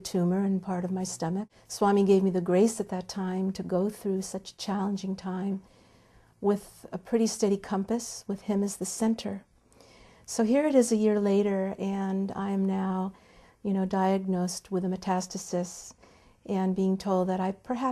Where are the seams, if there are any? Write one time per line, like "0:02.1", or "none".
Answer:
0:01.5